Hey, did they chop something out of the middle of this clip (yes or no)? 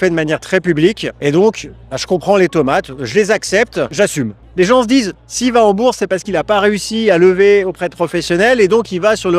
yes